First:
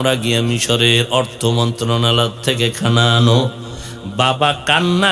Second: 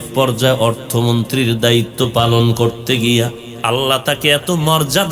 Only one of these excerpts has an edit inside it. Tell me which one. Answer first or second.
second